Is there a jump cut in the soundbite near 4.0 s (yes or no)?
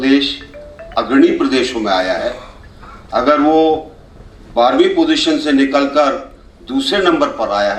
no